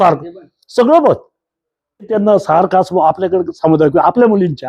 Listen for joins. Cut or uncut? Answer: cut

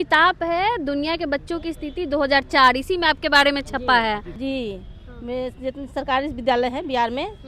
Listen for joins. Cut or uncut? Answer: cut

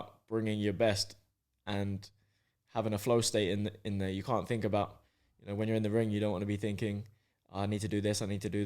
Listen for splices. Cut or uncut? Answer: uncut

